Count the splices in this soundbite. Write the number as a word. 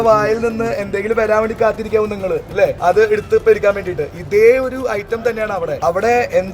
two